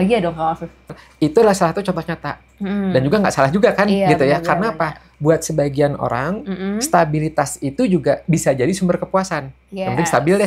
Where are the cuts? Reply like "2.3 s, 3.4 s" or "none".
0.9 s